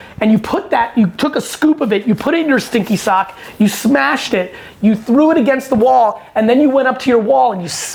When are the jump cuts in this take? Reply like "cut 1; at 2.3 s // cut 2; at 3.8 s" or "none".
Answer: none

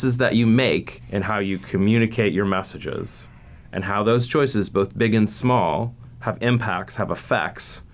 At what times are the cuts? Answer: cut 1; at 1.0 s // cut 2; at 6.0 s

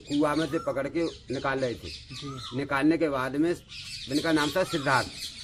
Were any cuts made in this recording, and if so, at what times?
none

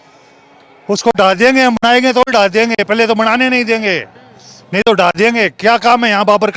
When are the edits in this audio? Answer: none

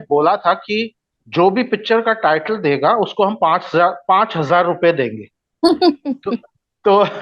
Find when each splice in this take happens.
none

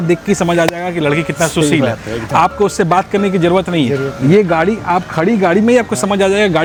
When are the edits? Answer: none

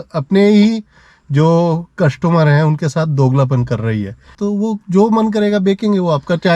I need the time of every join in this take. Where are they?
cut 1; at 4.3 s

